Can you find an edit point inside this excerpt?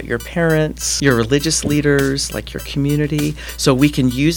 yes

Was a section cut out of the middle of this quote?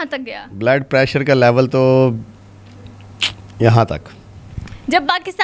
no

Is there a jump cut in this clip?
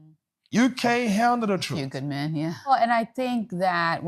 yes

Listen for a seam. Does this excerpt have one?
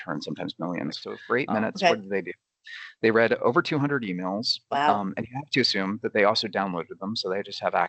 yes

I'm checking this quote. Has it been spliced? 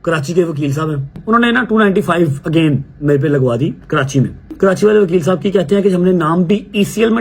yes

